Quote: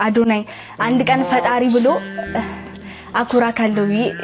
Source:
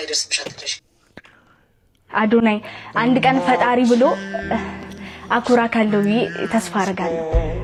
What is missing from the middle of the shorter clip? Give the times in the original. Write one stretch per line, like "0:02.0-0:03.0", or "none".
none